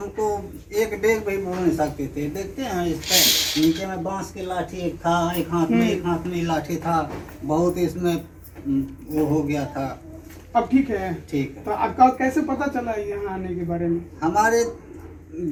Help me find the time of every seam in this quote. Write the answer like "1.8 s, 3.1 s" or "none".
none